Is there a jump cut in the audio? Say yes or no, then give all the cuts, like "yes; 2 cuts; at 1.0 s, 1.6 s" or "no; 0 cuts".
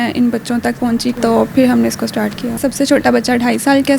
yes; 2 cuts; at 1.2 s, 2.6 s